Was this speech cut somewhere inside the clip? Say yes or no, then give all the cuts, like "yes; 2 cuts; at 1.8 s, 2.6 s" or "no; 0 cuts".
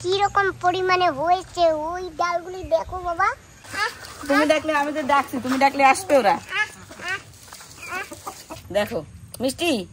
yes; 2 cuts; at 3.5 s, 8.5 s